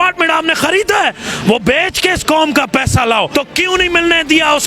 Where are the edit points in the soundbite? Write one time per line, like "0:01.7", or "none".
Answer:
0:03.3